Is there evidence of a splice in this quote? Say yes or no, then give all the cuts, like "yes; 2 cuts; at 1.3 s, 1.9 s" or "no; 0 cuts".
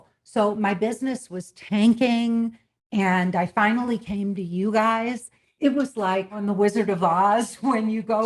yes; 2 cuts; at 5.5 s, 6.4 s